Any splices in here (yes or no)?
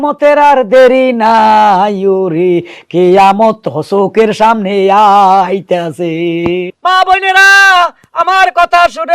yes